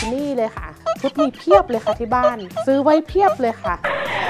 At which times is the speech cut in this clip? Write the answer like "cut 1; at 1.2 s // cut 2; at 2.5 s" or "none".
none

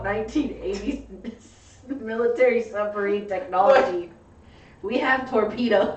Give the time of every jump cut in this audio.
none

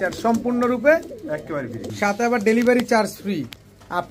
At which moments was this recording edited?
cut 1; at 1.8 s

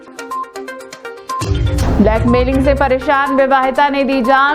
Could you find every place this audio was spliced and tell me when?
cut 1; at 1.1 s

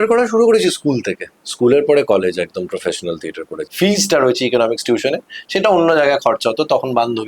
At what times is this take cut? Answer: cut 1; at 3.6 s

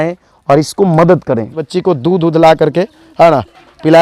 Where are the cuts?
cut 1; at 1.6 s

